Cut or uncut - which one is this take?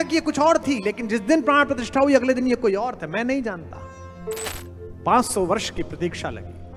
cut